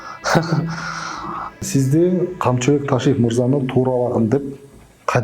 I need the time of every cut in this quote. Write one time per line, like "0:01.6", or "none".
0:01.7